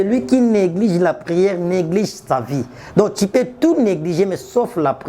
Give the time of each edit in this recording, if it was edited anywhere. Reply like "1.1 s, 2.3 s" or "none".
none

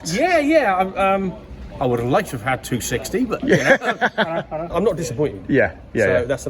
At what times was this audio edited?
4.7 s

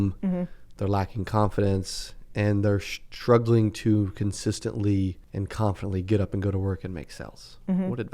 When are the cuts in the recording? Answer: 5.2 s

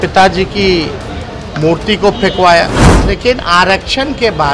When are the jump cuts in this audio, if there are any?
2.9 s

